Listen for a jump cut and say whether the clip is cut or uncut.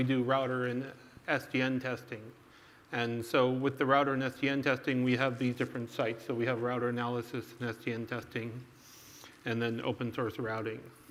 uncut